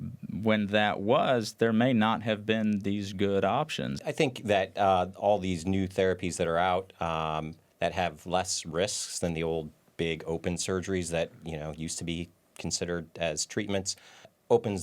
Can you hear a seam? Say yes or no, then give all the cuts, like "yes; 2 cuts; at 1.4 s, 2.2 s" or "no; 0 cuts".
yes; 1 cut; at 3.9 s